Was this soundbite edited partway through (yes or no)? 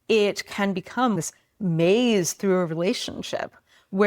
yes